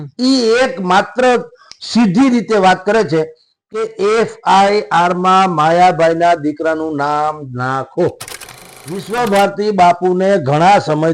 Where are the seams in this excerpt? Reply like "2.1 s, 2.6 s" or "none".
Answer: 8.8 s